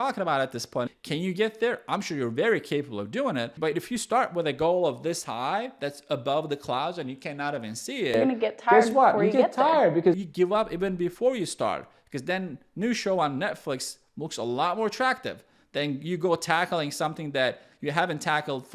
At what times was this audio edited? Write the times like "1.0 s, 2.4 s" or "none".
1.0 s, 3.5 s